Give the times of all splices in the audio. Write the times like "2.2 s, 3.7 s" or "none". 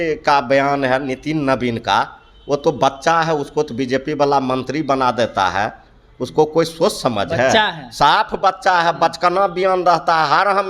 none